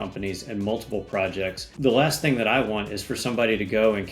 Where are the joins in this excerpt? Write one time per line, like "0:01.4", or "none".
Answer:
0:01.7